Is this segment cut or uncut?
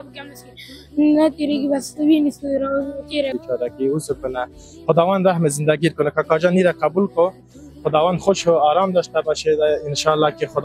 cut